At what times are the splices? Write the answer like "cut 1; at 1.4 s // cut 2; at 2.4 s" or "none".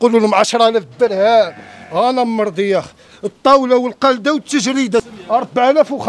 cut 1; at 5.0 s